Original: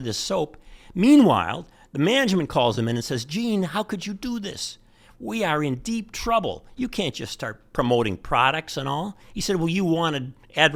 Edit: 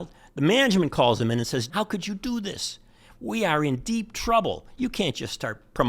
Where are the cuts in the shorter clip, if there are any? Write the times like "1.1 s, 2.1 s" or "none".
1.7 s